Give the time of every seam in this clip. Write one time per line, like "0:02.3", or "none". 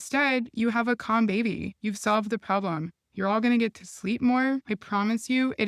0:01.7
0:03.0
0:04.7